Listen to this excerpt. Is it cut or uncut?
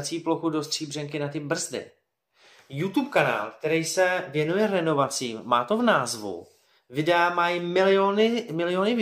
uncut